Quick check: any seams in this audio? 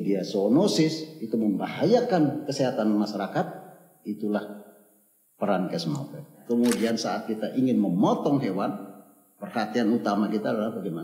yes; 1 cut; at 6.3 s

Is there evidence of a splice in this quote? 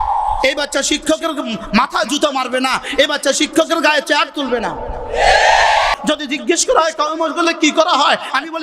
yes; 1 cut; at 5.9 s

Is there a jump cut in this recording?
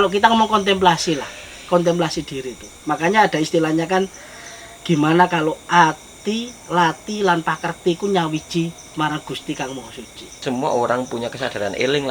yes; 1 cut; at 10.4 s

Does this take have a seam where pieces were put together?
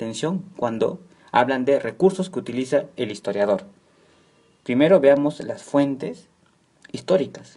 yes; 1 cut; at 1.9 s

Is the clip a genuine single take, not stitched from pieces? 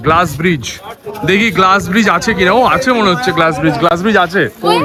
yes; 0 cuts

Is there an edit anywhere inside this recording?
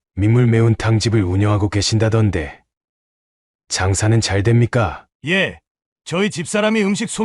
yes; 1 cut; at 5.0 s

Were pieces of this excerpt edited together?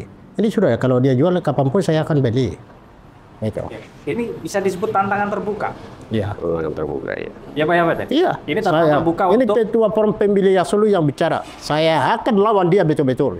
no; 0 cuts

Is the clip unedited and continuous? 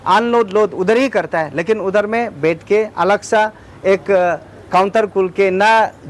yes; 0 cuts

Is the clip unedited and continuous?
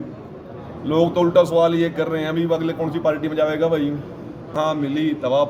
no; 1 cut; at 4.5 s

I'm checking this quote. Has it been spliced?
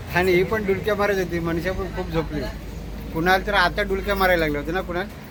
no; 0 cuts

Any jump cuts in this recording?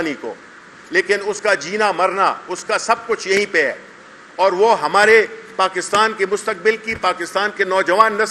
no; 0 cuts

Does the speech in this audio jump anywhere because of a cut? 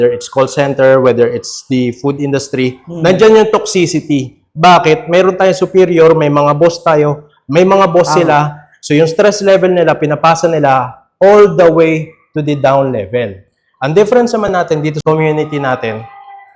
yes; 1 cut; at 15.0 s

